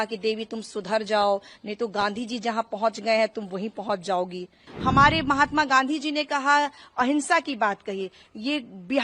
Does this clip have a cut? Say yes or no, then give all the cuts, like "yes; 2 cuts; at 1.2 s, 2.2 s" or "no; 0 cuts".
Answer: yes; 1 cut; at 4.6 s